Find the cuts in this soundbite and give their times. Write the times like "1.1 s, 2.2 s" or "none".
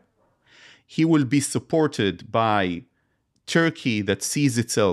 none